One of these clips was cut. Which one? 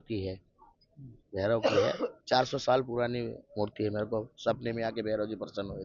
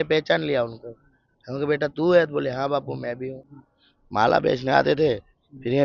second; 1 cut; at 3.4 s

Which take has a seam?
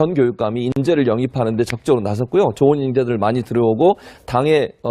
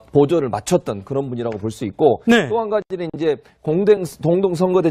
first; 1 cut; at 2.3 s

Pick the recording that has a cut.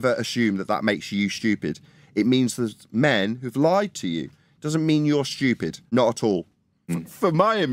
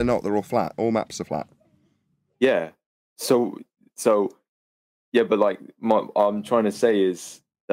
first; 2 cuts; at 5.8 s, 6.9 s

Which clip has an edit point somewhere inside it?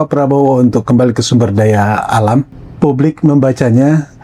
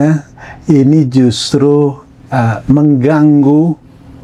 first; 1 cut; at 2.6 s

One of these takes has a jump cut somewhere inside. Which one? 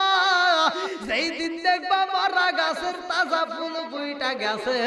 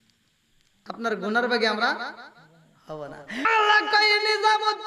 second; 1 cut; at 3.5 s

